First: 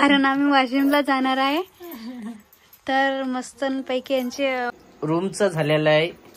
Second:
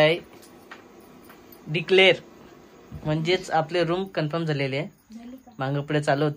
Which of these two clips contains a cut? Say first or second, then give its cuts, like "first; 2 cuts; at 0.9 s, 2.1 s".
first; 1 cut; at 4.8 s